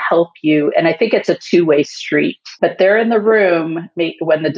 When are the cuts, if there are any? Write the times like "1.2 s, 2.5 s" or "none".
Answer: 2.4 s